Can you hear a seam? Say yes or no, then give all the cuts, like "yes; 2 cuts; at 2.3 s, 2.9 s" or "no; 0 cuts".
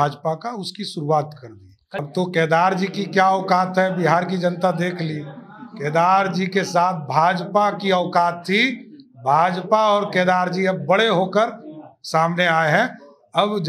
yes; 1 cut; at 2.0 s